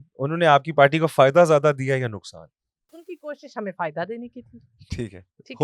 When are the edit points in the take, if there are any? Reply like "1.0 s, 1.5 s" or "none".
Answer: 2.9 s